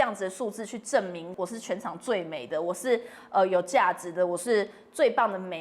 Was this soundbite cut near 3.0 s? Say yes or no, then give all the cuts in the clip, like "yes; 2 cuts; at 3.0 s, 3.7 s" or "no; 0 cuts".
no; 1 cut; at 1.3 s